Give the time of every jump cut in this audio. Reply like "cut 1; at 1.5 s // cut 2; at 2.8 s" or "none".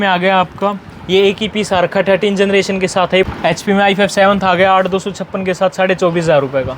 cut 1; at 3.3 s